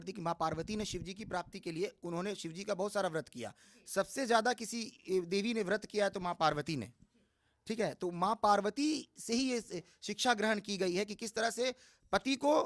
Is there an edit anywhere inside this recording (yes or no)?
no